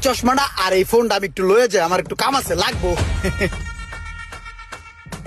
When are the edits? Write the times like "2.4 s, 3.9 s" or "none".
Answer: none